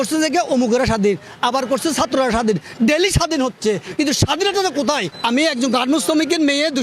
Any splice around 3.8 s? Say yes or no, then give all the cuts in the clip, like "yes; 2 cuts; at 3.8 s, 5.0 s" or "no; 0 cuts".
no; 0 cuts